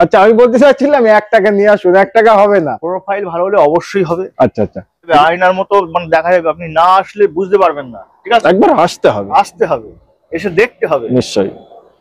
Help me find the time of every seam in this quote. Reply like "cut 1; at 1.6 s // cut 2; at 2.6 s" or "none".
cut 1; at 5.1 s